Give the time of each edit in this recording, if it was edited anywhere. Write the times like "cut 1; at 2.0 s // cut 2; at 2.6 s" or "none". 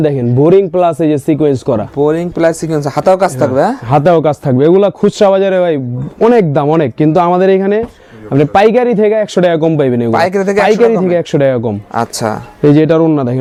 none